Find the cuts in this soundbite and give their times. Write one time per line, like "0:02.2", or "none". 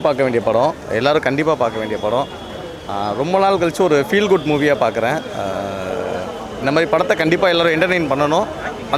none